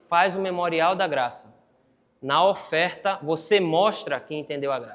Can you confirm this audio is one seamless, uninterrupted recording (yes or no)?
yes